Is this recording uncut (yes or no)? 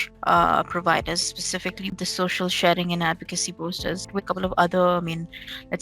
no